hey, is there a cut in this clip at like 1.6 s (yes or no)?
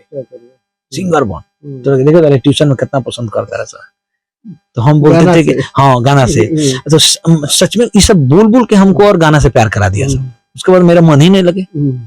no